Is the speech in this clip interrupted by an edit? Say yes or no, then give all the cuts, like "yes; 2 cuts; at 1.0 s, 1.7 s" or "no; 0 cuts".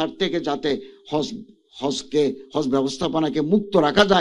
no; 0 cuts